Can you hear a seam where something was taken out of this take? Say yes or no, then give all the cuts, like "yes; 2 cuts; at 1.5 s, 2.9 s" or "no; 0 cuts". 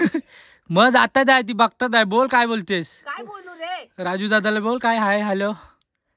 no; 0 cuts